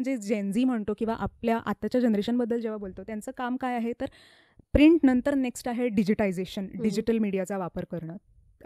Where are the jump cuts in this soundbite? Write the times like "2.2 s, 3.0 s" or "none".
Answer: none